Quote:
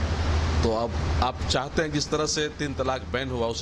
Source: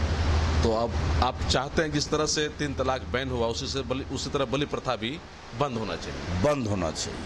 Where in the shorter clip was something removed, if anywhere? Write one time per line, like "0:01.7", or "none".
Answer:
none